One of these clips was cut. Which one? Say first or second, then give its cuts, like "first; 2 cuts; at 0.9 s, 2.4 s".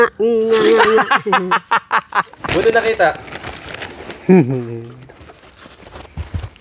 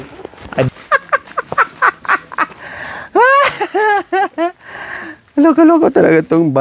first; 1 cut; at 2.4 s